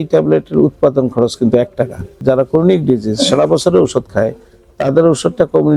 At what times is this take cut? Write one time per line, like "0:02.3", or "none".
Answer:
0:02.2